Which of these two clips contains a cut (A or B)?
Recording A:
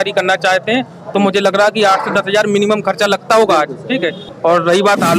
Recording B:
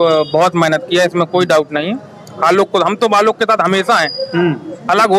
A